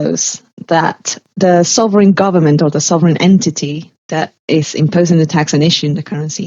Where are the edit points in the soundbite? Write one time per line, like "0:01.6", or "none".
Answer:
0:01.2